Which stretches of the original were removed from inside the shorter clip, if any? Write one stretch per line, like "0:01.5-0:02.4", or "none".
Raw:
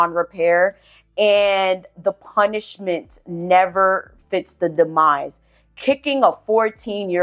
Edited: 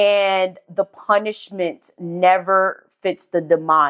none